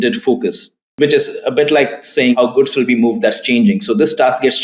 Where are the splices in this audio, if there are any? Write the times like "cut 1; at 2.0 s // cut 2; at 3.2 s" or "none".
cut 1; at 2.4 s